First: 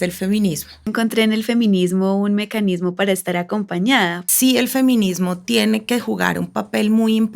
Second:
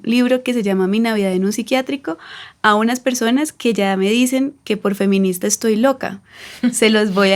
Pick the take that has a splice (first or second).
first